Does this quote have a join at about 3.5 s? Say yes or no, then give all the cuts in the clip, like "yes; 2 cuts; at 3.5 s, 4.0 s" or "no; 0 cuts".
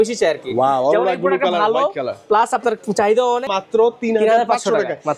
yes; 1 cut; at 3.5 s